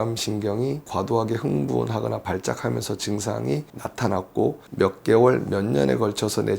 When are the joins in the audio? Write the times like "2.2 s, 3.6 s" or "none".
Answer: 0.9 s, 3.8 s